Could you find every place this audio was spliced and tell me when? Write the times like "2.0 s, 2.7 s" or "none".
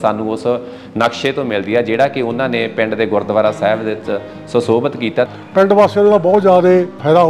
5.3 s